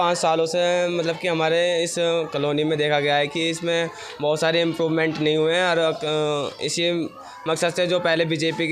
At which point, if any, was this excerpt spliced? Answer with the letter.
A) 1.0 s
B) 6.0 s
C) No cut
C